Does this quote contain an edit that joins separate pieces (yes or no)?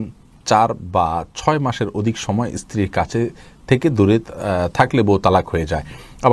no